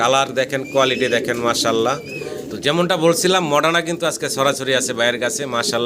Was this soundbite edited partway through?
yes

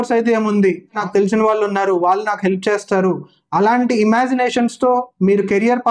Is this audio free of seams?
no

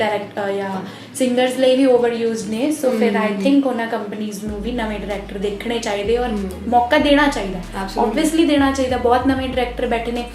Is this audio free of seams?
yes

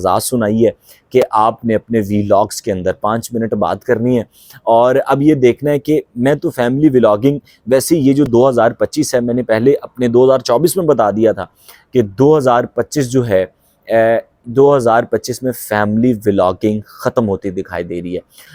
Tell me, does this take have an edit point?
no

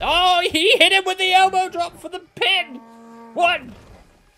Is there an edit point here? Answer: no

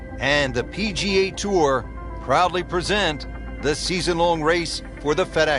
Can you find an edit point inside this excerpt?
no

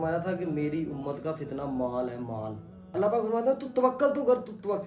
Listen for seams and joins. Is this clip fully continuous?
no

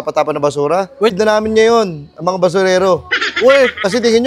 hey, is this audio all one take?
no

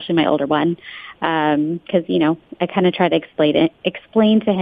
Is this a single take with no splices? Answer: yes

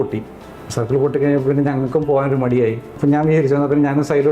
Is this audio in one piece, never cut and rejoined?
no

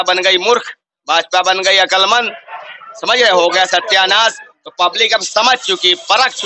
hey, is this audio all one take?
yes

